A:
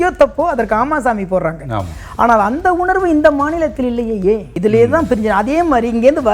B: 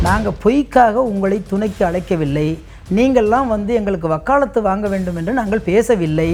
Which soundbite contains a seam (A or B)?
A